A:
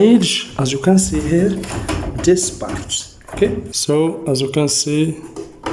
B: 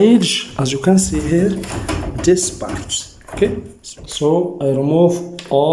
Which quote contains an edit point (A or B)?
B